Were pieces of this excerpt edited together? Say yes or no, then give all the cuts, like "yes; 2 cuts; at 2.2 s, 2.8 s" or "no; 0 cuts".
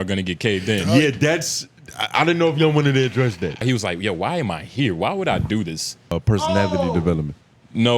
yes; 2 cuts; at 3.6 s, 6.2 s